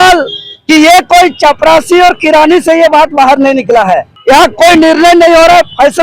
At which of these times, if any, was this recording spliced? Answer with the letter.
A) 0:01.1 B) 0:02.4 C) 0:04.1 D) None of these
C